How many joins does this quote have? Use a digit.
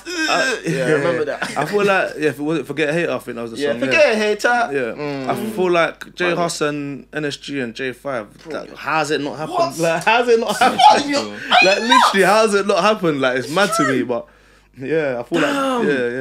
0